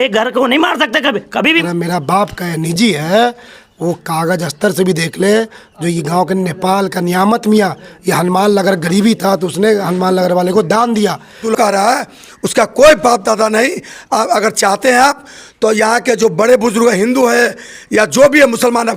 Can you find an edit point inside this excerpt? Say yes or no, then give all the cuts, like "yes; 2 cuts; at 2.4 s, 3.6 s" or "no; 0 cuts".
yes; 2 cuts; at 1.6 s, 11.4 s